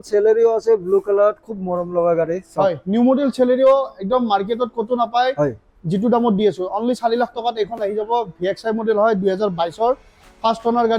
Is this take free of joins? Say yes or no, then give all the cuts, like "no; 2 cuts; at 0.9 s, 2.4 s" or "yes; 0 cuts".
yes; 0 cuts